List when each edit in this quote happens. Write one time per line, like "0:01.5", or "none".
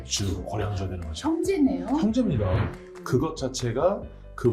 0:02.6